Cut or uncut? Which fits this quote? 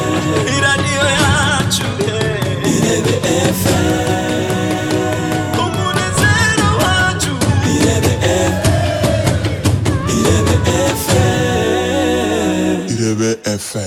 uncut